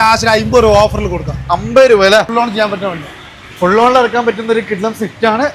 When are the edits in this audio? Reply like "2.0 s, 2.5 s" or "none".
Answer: 2.3 s